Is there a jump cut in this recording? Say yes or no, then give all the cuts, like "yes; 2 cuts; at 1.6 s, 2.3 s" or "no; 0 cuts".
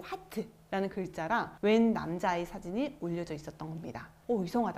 no; 0 cuts